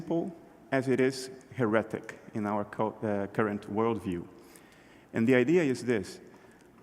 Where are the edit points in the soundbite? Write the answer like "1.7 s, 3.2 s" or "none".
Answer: 1.7 s